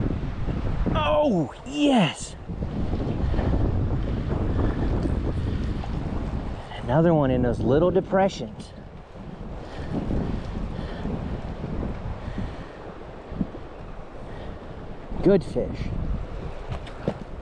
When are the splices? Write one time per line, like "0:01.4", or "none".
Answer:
none